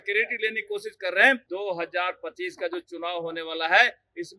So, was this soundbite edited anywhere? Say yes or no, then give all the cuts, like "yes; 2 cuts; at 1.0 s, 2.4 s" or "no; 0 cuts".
yes; 1 cut; at 1.4 s